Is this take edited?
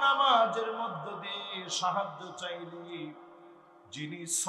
no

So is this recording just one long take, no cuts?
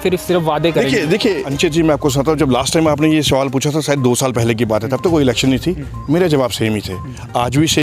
no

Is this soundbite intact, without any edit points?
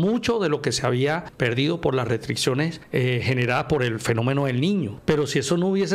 no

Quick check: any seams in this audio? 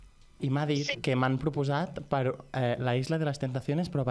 yes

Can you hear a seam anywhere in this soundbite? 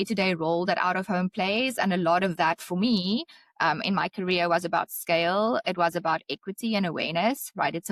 no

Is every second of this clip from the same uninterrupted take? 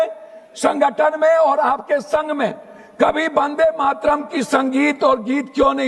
yes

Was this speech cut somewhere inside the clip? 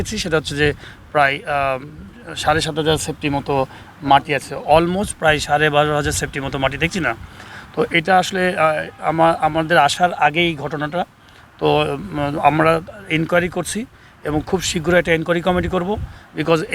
no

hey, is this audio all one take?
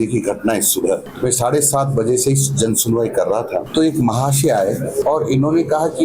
no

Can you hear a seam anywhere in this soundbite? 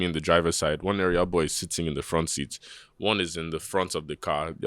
no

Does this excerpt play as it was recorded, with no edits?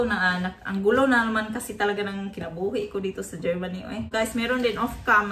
no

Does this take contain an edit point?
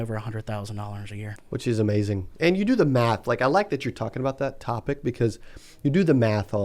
yes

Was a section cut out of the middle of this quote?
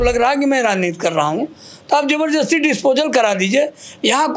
no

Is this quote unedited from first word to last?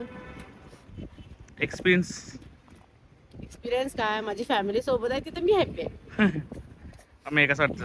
yes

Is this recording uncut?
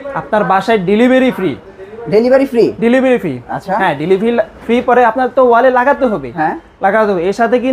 yes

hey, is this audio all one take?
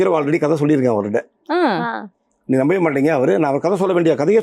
yes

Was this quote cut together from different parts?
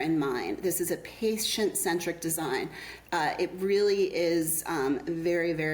no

